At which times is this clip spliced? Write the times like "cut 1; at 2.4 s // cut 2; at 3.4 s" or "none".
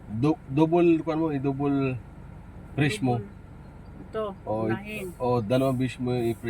none